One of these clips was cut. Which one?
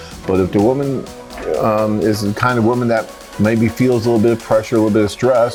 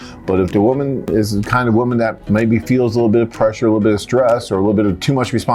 second; 2 cuts; at 1.1 s, 2.2 s

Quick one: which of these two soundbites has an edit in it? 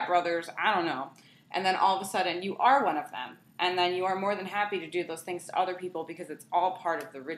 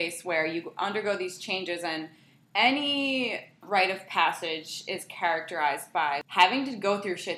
second; 2 cuts; at 3.6 s, 6.2 s

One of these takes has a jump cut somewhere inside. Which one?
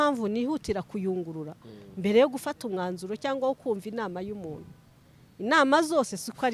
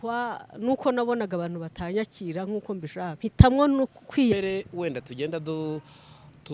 second; 2 cuts; at 3.2 s, 4.3 s

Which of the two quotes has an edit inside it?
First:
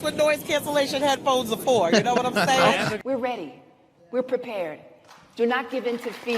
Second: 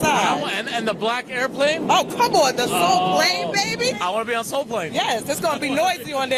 first; 1 cut; at 3.0 s

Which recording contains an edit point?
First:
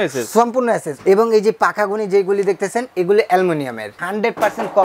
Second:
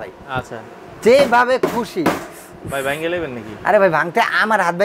first; 2 cuts; at 0.9 s, 3.9 s

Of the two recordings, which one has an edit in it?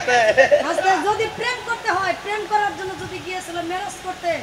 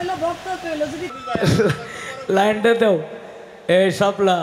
second; 1 cut; at 1.1 s

